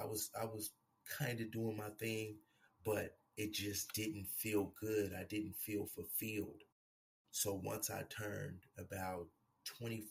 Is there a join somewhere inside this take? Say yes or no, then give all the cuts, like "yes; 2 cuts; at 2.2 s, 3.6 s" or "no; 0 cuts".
no; 0 cuts